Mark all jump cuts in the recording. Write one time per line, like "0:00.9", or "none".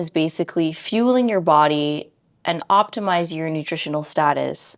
none